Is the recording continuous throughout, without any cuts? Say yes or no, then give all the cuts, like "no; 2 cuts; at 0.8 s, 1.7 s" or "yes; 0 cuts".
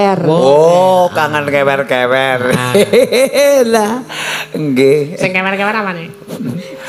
yes; 0 cuts